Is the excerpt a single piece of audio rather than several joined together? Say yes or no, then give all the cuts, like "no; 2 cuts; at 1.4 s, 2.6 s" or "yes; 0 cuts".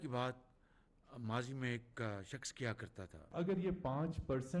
no; 1 cut; at 3.2 s